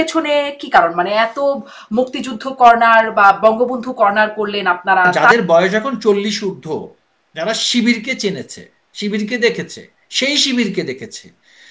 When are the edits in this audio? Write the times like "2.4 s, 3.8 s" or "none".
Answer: 5.2 s